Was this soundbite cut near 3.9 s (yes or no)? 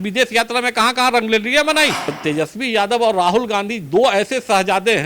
no